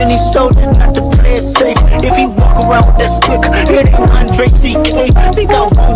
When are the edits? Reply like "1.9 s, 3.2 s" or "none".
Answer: none